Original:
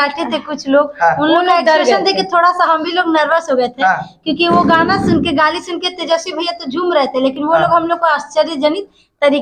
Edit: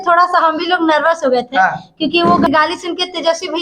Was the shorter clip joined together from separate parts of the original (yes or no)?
yes